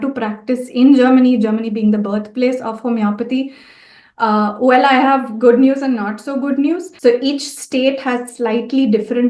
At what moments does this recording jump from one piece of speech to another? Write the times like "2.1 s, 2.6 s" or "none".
6.9 s